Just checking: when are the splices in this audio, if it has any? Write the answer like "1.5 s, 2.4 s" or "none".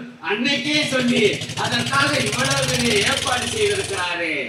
none